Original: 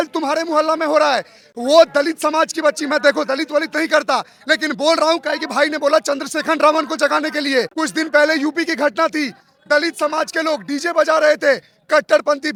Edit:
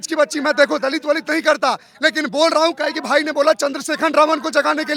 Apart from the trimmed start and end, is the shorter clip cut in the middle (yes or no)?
no